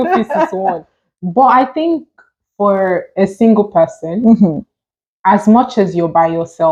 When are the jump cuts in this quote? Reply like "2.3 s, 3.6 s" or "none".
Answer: none